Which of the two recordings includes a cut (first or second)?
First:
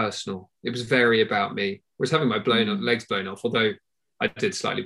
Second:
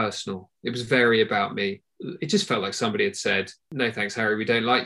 second